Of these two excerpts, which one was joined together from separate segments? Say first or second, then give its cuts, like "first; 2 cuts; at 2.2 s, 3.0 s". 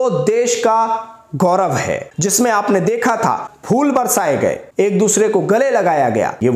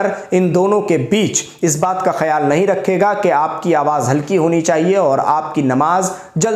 first; 2 cuts; at 2.1 s, 3.5 s